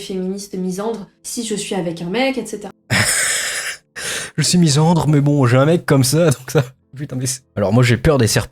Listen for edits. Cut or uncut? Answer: cut